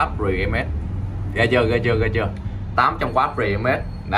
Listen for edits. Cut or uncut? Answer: uncut